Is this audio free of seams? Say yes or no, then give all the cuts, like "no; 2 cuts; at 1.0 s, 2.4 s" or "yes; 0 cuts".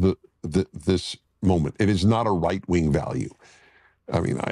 no; 1 cut; at 1.2 s